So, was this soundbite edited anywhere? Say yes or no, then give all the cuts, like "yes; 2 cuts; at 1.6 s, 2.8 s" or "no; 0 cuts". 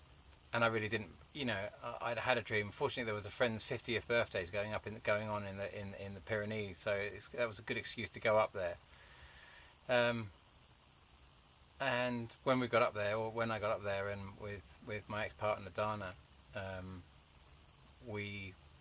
yes; 1 cut; at 4.7 s